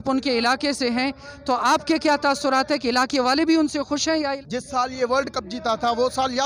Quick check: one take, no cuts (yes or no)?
no